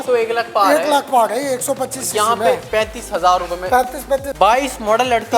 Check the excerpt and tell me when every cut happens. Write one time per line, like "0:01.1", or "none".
0:04.3